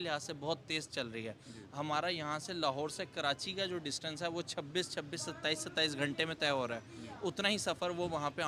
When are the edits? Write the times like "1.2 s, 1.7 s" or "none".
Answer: none